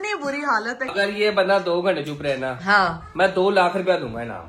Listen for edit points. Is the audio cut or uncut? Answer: cut